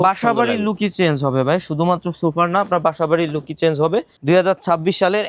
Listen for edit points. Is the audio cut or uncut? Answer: cut